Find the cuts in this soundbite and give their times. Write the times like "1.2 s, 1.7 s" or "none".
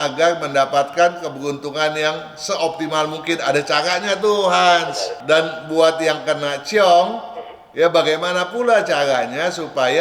5.1 s